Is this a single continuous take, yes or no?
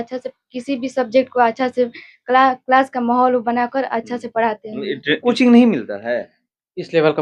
no